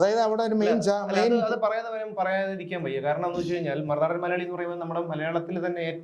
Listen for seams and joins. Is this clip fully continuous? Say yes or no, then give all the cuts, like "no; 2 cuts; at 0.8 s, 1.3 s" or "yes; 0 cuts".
yes; 0 cuts